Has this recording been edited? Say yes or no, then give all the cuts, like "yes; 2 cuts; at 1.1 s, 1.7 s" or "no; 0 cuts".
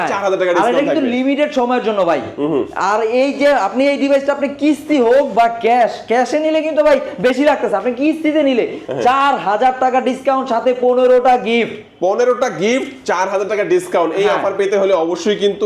no; 0 cuts